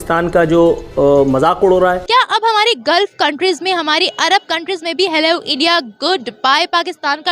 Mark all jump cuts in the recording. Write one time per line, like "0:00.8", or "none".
0:02.0